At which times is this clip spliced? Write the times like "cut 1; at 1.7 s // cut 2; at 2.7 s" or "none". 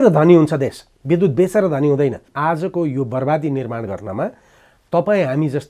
cut 1; at 2.3 s

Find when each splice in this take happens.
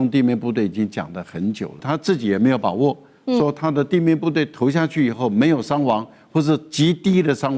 cut 1; at 1.8 s

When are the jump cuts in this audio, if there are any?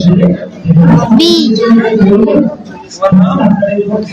cut 1; at 0.9 s

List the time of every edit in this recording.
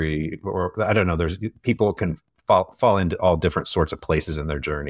none

